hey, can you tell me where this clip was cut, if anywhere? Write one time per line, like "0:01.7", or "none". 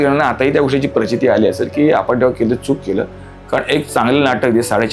none